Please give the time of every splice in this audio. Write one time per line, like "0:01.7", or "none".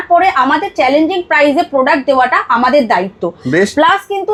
none